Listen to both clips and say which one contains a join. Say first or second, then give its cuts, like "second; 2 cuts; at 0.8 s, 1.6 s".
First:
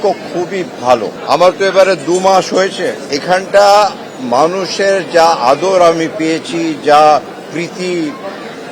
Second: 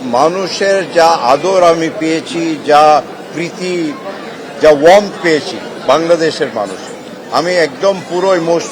first; 2 cuts; at 1.1 s, 3.1 s